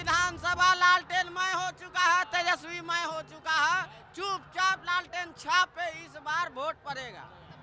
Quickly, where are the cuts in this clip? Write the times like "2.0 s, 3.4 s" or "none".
none